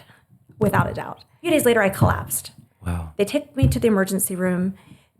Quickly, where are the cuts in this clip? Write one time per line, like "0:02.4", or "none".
0:01.5